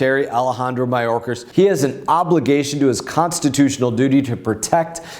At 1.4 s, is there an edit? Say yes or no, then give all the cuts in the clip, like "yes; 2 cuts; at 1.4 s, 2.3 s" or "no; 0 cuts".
yes; 1 cut; at 1.4 s